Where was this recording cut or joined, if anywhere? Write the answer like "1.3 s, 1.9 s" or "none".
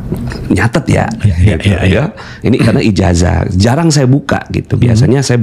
none